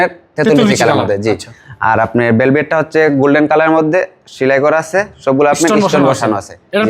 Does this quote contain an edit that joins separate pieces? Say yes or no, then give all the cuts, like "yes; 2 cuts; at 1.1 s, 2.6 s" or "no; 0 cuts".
no; 0 cuts